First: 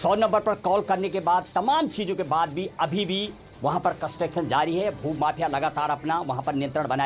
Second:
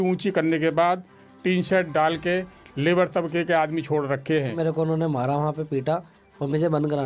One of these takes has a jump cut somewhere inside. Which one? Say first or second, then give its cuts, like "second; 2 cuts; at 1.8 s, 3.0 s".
second; 1 cut; at 4.5 s